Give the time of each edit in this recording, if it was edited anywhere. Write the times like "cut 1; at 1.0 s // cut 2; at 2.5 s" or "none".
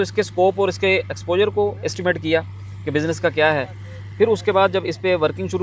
none